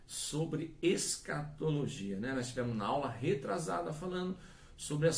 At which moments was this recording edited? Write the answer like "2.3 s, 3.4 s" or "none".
none